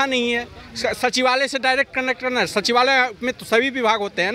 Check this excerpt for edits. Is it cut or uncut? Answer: uncut